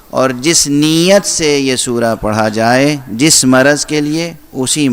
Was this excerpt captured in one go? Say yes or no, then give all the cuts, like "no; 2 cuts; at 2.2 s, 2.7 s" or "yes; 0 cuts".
yes; 0 cuts